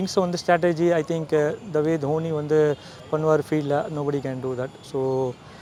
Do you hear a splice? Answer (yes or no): no